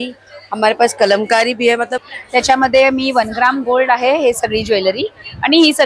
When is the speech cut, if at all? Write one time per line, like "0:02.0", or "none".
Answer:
0:02.0